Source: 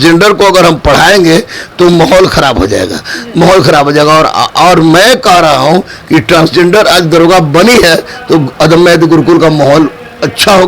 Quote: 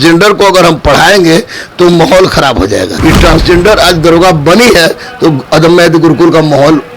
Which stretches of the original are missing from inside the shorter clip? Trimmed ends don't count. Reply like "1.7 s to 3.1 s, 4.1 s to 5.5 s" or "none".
2.9 s to 6.0 s